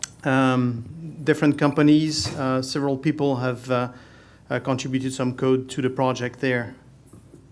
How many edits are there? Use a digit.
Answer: 0